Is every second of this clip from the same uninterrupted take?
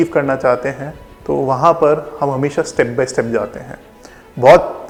yes; 0 cuts

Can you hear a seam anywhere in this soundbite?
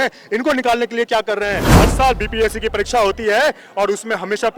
yes; 1 cut; at 1.7 s

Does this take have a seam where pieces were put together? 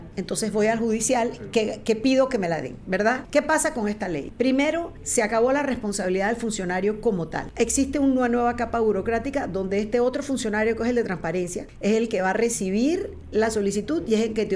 yes; 5 cuts; at 3.2 s, 4.3 s, 5.0 s, 7.4 s, 11.6 s

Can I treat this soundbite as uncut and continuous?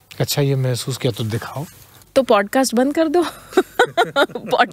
no; 1 cut; at 1.9 s

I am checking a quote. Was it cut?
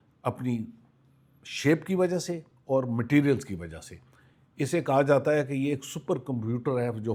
no; 0 cuts

